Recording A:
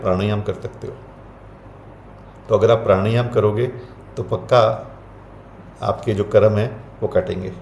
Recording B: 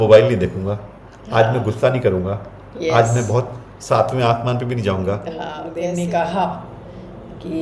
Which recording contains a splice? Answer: B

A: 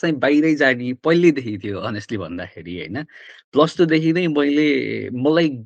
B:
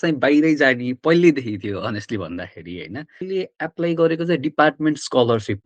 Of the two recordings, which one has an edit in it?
B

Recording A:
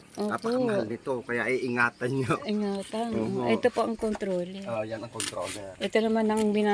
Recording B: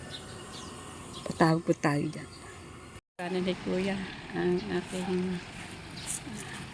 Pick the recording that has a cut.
B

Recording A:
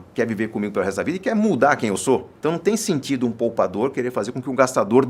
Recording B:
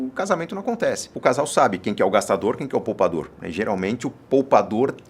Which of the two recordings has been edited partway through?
B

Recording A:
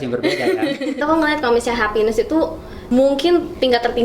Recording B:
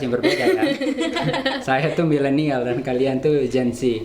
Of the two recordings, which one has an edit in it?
A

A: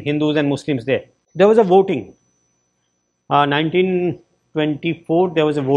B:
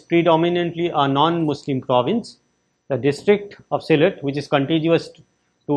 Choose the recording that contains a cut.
A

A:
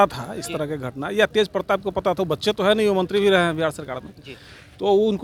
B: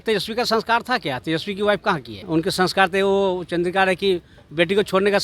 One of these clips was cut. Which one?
B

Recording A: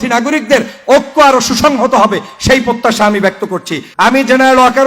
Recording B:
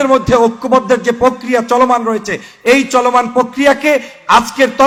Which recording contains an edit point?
A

